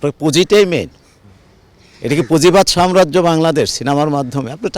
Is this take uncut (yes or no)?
yes